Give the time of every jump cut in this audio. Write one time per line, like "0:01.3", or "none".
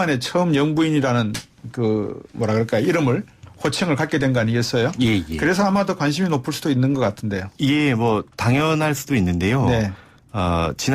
0:04.8